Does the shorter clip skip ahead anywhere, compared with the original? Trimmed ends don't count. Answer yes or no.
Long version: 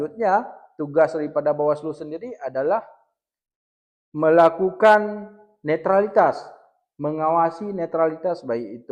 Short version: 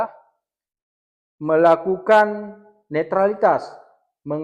no